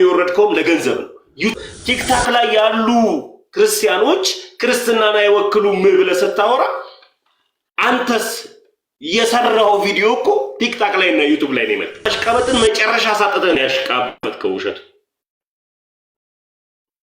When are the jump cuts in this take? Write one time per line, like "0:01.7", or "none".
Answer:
0:01.5
0:12.1